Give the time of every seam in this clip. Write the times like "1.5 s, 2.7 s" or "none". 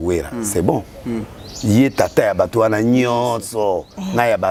none